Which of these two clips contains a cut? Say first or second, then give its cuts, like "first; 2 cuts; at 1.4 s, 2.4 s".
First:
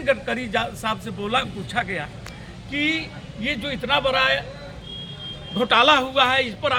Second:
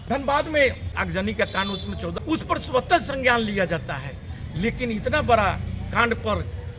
second; 2 cuts; at 0.9 s, 2.1 s